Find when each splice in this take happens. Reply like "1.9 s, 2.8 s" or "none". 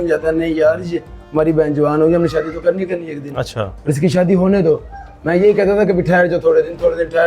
none